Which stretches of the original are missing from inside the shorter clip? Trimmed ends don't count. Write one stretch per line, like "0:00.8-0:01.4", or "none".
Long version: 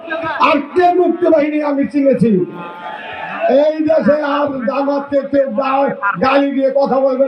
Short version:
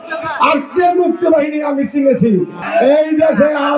0:02.6-0:03.3